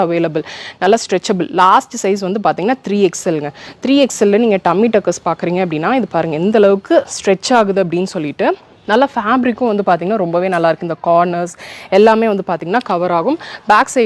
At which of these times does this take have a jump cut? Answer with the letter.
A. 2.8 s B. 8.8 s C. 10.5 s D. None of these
D